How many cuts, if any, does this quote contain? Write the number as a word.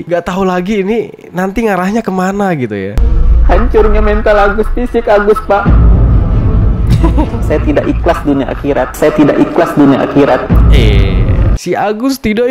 two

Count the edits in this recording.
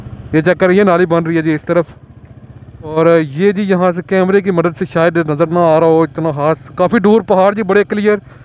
one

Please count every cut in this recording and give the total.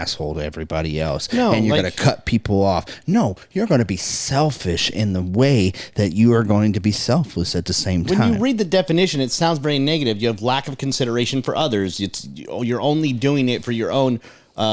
zero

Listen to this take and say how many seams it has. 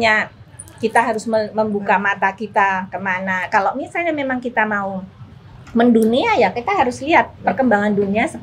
zero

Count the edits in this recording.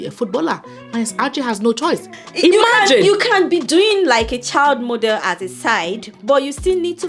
one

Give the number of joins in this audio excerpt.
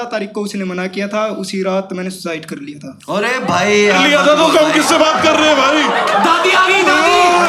zero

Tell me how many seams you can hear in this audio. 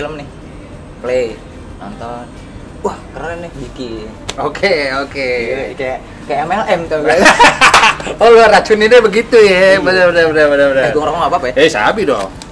zero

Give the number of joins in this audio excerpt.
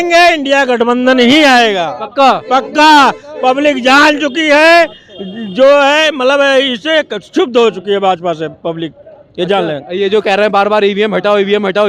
zero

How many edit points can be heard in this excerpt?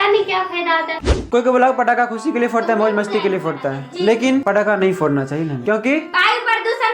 two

